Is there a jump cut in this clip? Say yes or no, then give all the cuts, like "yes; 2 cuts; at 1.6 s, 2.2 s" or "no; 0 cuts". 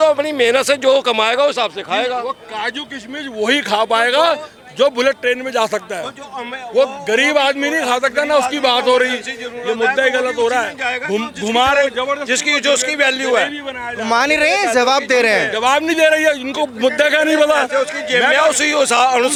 no; 0 cuts